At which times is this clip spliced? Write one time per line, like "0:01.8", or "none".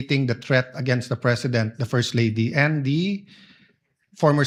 none